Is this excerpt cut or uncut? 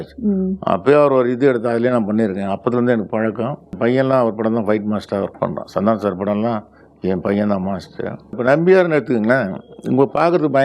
cut